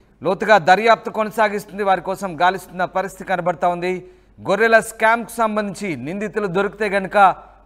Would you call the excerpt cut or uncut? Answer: uncut